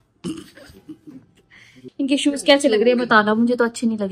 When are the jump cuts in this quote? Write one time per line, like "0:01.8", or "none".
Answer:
0:01.8